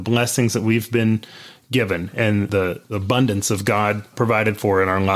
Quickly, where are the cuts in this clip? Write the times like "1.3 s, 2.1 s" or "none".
2.5 s, 4.1 s